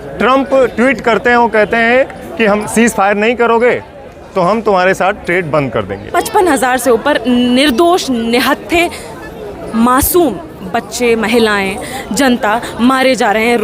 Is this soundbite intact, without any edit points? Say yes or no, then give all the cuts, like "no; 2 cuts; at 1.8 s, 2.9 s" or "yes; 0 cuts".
no; 2 cuts; at 2.6 s, 6.0 s